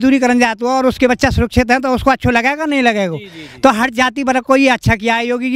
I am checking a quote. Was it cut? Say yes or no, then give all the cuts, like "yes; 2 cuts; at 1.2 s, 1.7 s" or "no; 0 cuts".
no; 0 cuts